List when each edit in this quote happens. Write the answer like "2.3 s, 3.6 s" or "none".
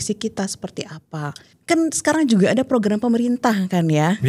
1.5 s